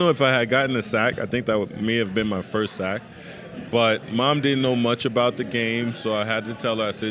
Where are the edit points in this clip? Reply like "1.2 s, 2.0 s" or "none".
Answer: 3.6 s